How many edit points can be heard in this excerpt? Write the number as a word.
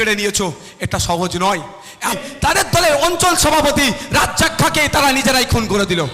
one